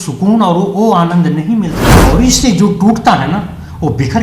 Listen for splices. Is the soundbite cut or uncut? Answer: cut